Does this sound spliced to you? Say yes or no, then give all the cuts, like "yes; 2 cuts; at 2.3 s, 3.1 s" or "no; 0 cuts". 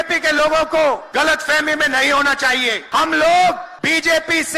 yes; 3 cuts; at 1.1 s, 2.8 s, 3.7 s